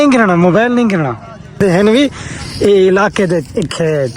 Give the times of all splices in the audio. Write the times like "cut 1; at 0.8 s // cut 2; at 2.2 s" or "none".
cut 1; at 1.6 s